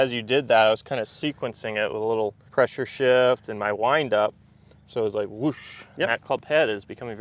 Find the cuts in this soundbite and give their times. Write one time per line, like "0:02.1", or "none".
0:02.4
0:06.2